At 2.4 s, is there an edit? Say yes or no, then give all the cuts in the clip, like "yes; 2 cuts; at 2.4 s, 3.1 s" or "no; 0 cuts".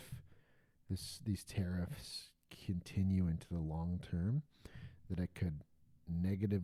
no; 0 cuts